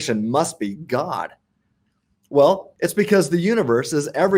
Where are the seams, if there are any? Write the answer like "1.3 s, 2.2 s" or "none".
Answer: 2.7 s